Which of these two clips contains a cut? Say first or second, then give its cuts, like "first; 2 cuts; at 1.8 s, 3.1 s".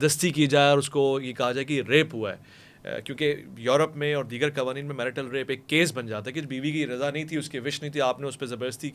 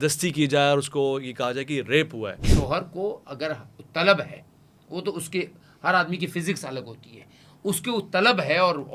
second; 1 cut; at 2.5 s